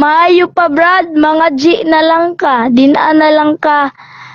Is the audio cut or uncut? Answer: uncut